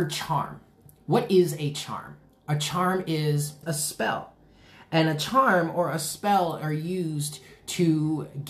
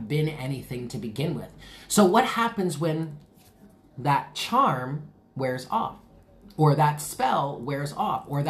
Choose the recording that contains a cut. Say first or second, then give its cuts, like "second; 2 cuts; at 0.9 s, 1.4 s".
first; 1 cut; at 3.6 s